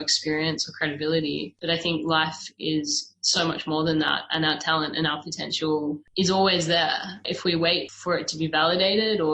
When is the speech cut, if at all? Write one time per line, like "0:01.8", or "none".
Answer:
0:07.9